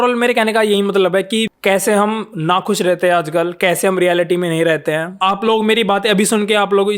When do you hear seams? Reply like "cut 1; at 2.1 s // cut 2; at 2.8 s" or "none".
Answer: cut 1; at 1.5 s // cut 2; at 5.1 s